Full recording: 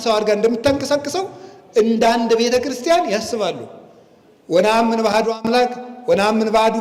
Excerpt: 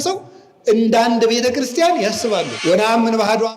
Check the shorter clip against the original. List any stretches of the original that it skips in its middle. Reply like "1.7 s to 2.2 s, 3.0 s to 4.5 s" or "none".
3.6 s to 4.4 s

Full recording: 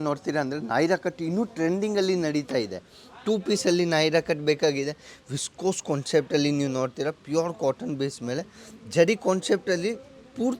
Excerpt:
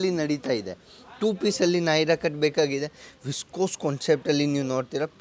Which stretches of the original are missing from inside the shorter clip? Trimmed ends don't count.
none

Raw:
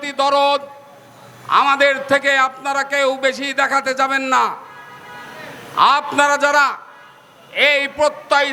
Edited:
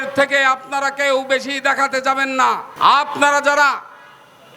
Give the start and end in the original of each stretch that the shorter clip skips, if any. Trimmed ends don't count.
4.6 s to 5.6 s

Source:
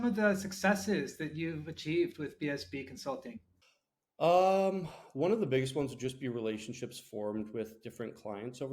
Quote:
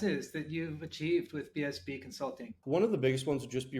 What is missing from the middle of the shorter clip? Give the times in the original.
3.4 s to 5.0 s

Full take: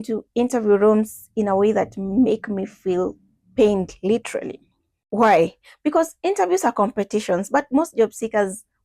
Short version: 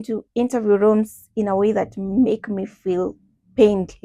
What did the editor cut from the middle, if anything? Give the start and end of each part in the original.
none

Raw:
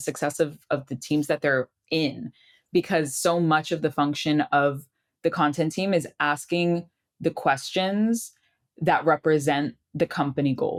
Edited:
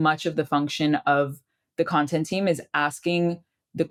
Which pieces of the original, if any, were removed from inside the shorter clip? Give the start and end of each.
none

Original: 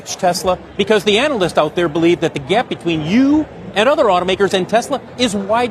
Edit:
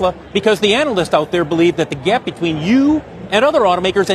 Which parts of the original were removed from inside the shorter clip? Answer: none

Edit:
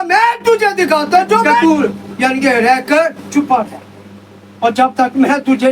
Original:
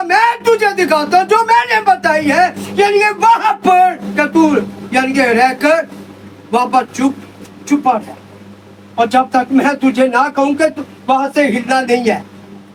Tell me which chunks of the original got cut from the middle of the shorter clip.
1.6 s to 4.3 s, 5.9 s to 7.6 s

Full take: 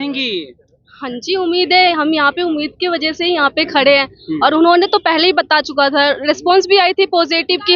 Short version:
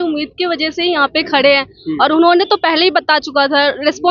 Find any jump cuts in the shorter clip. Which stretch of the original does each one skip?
none

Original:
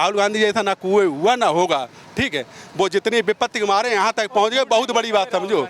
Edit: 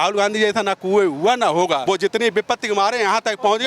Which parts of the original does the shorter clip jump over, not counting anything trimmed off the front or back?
1.8 s to 2.7 s

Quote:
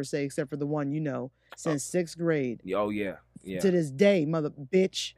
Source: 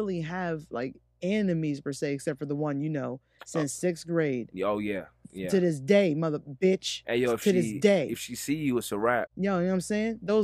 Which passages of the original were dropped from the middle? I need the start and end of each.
none

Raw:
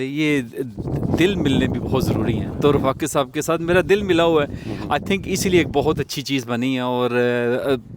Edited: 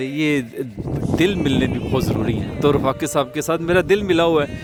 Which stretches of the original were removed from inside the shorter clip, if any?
none

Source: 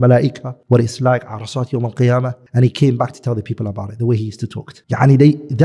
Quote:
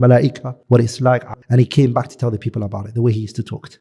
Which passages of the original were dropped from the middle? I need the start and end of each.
1.4 s to 2.4 s

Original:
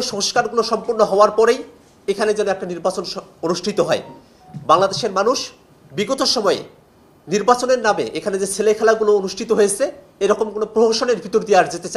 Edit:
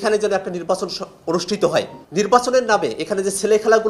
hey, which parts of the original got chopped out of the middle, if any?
4.1 s to 7.1 s

